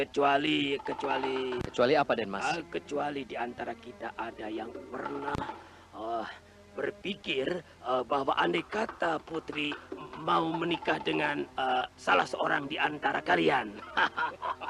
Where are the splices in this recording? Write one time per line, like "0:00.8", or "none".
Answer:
0:01.6